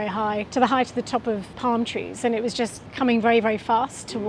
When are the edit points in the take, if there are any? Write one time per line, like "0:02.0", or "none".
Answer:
0:01.5
0:02.8